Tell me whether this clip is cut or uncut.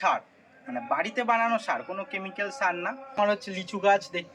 cut